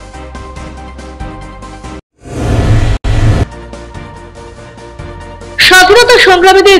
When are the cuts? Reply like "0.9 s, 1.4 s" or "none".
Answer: 0.9 s